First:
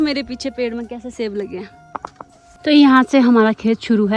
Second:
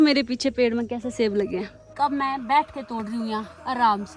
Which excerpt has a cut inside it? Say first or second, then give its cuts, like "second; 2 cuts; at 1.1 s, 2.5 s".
second; 1 cut; at 1.8 s